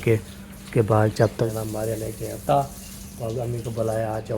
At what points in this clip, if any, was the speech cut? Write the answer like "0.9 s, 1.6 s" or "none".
1.5 s